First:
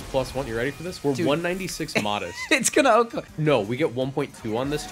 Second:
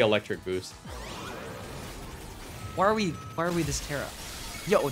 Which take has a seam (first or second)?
first